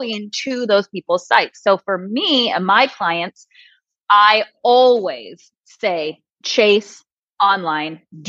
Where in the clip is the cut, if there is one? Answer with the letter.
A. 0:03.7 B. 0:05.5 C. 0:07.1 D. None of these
D